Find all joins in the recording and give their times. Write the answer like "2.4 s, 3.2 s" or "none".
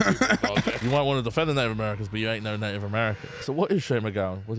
0.8 s, 3.4 s